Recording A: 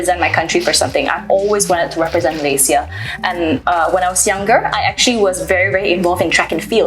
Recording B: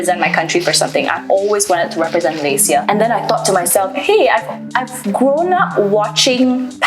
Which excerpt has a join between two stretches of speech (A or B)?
B